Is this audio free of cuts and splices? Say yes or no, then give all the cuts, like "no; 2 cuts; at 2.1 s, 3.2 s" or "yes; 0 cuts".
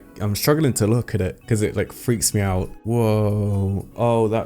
no; 1 cut; at 2.8 s